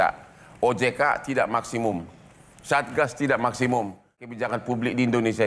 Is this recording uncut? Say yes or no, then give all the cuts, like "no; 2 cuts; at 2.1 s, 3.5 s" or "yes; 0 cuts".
no; 1 cut; at 4.4 s